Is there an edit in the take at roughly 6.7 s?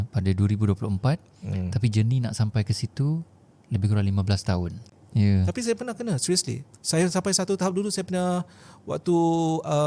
no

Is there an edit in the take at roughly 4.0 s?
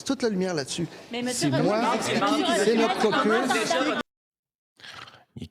yes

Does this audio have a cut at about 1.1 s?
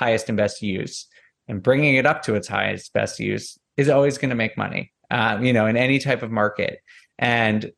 no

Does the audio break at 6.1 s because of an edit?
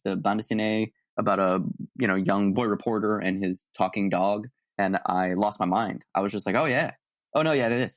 no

